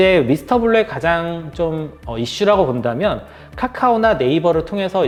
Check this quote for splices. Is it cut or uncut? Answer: uncut